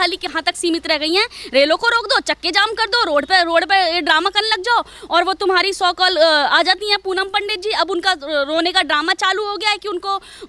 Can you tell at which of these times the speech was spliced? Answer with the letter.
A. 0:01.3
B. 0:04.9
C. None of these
C